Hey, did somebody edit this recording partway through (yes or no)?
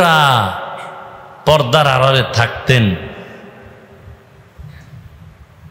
no